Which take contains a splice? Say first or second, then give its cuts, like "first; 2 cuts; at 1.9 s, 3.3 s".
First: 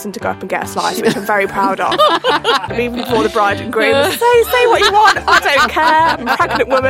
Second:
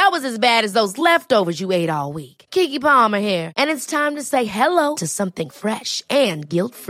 first; 1 cut; at 2.7 s